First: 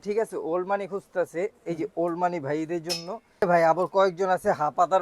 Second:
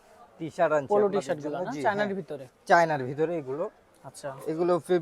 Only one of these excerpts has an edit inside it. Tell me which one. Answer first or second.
first